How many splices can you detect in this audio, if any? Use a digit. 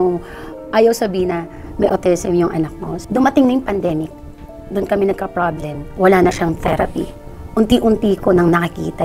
0